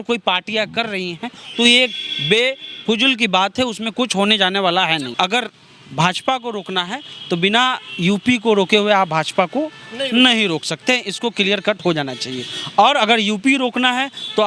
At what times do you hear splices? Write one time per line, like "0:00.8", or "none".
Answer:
0:05.1